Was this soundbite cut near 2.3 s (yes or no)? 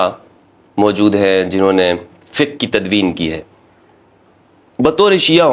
no